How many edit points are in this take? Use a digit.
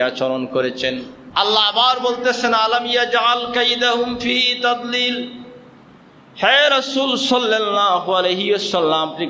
1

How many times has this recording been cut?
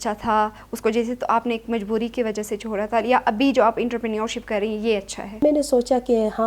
1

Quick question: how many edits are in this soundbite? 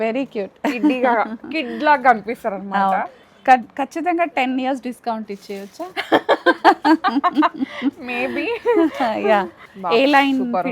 1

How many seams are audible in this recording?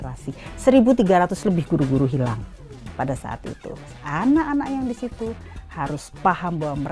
1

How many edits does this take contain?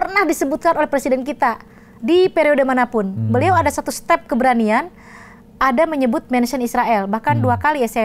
0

